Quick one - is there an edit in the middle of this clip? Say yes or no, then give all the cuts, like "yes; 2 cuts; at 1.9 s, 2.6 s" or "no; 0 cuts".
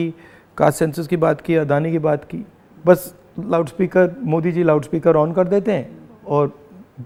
no; 0 cuts